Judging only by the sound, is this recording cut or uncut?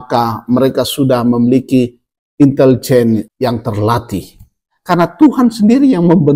cut